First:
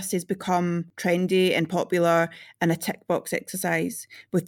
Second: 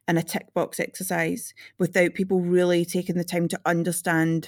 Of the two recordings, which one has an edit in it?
first; 1 cut; at 0.9 s

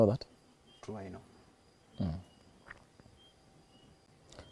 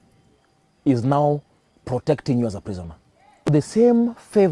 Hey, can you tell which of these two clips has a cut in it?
second; 1 cut; at 3.5 s

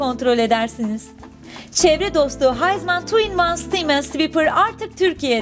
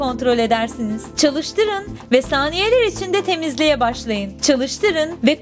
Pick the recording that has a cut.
second; 2 cuts; at 1.1 s, 4.3 s

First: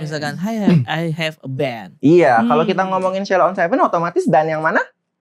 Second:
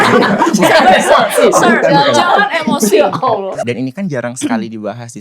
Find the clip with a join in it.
second; 1 cut; at 3.6 s

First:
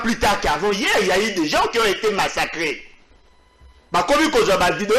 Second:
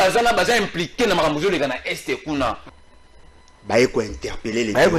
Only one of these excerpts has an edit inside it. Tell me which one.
second; 1 cut; at 2.7 s

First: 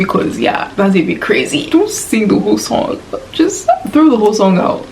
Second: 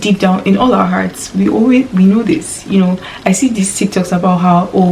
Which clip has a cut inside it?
first; 1 cut; at 1.7 s

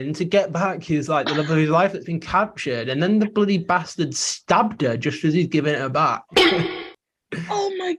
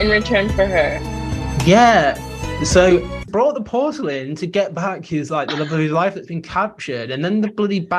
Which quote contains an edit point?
second; 1 cut; at 3.3 s

